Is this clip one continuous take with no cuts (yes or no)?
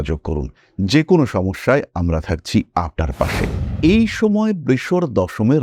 no